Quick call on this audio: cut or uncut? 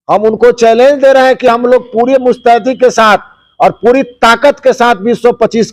uncut